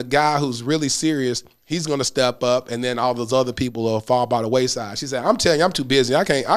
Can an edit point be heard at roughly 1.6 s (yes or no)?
no